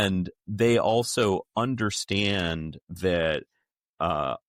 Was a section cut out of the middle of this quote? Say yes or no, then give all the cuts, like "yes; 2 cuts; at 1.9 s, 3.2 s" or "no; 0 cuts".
no; 0 cuts